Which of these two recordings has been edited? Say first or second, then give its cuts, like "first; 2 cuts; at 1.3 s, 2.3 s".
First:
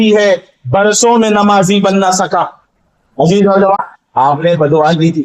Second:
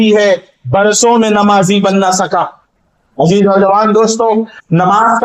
first; 1 cut; at 3.8 s